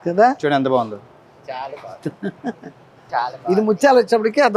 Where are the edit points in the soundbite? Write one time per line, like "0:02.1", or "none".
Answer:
0:03.0